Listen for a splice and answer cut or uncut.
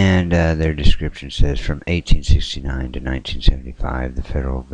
uncut